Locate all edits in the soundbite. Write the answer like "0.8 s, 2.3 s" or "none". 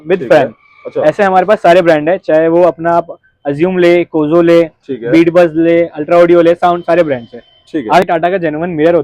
8.0 s